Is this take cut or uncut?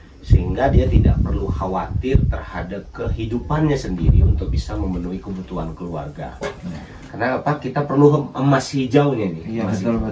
cut